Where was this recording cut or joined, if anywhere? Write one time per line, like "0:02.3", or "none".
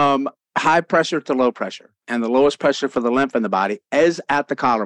0:02.0